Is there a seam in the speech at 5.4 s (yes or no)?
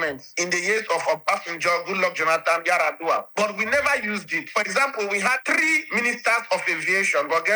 yes